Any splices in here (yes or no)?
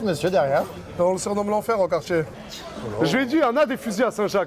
yes